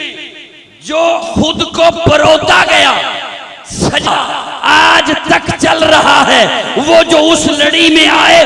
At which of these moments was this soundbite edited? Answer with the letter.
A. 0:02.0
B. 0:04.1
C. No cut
B